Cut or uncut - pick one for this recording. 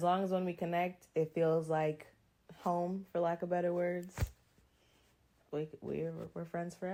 uncut